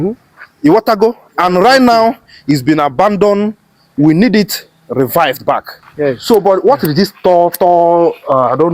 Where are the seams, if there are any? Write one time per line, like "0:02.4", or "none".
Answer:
0:05.6